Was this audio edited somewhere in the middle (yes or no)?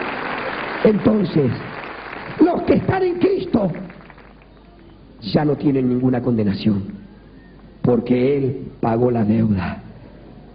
no